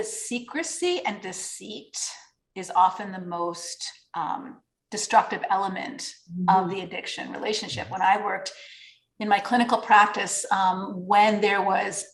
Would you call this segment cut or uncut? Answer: uncut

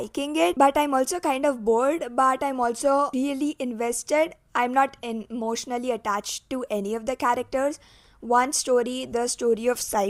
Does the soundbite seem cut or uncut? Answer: uncut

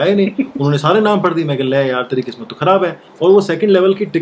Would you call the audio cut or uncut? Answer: cut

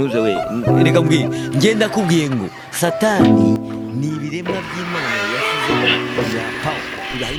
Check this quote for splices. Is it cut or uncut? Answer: uncut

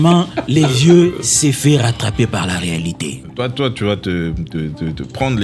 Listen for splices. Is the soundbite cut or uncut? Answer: cut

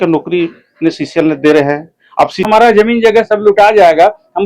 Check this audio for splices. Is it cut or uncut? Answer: cut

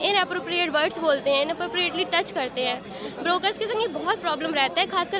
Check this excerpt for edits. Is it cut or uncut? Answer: uncut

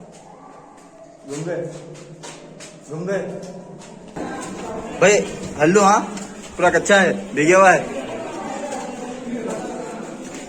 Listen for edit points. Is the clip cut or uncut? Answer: cut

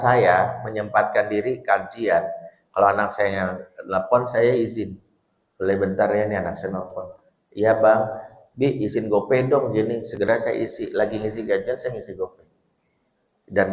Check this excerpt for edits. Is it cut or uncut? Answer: uncut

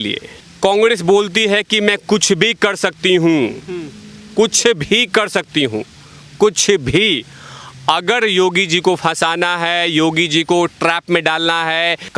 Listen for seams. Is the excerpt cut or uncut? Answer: uncut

